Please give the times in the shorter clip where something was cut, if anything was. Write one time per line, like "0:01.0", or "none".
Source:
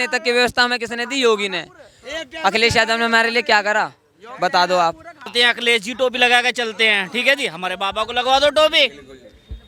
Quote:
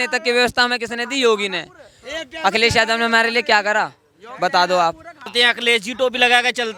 none